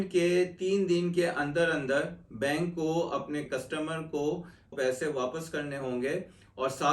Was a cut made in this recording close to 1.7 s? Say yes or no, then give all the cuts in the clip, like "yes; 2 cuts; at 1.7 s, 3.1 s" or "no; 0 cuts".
no; 2 cuts; at 3.5 s, 4.7 s